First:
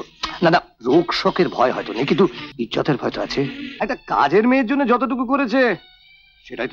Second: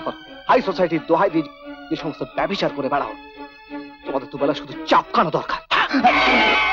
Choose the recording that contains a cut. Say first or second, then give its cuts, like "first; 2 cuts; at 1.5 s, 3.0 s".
first; 2 cuts; at 2.4 s, 3.6 s